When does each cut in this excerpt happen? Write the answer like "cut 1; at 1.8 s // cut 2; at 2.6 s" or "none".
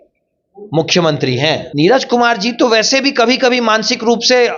cut 1; at 1.7 s

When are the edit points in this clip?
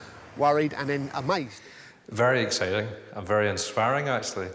cut 1; at 1.6 s

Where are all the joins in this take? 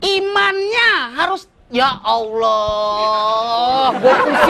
none

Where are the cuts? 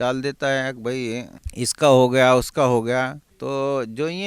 cut 1; at 1.4 s // cut 2; at 3.3 s

